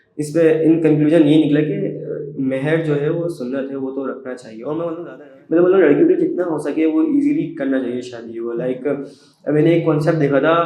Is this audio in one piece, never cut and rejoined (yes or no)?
no